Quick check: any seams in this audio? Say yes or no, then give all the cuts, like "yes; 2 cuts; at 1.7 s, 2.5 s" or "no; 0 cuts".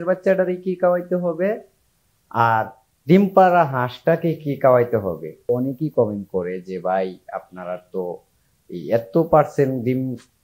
yes; 1 cut; at 5.5 s